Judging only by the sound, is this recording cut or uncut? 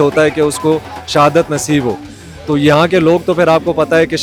uncut